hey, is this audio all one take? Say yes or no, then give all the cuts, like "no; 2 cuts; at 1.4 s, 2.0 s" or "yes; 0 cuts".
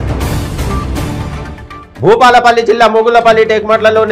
no; 1 cut; at 1.2 s